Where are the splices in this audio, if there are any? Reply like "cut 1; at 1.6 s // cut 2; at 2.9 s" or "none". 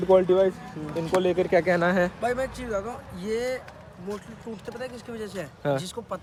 none